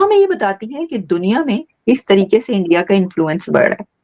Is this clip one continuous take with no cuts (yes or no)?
yes